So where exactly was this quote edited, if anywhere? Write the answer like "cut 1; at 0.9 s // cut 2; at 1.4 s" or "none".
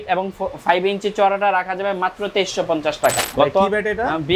cut 1; at 3.3 s